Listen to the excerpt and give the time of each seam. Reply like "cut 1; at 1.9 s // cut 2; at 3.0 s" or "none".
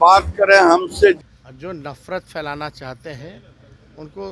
cut 1; at 1.2 s